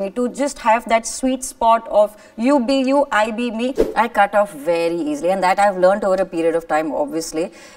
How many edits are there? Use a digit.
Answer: 1